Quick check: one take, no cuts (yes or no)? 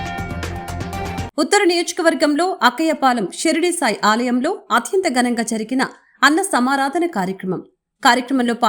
no